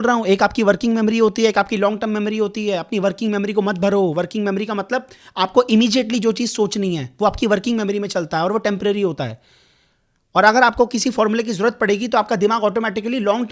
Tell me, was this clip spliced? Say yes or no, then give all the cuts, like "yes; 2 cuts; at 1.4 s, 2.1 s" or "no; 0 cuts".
no; 0 cuts